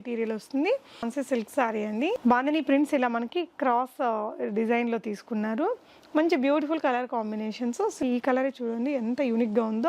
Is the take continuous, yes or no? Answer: no